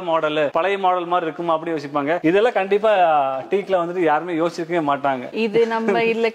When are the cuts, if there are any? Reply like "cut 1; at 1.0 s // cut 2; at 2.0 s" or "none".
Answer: none